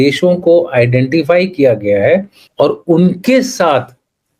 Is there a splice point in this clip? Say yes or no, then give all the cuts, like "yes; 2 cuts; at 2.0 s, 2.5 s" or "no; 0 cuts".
yes; 1 cut; at 2.4 s